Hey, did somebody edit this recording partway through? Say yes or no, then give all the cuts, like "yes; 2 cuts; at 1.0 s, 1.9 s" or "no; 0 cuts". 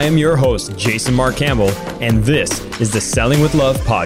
no; 0 cuts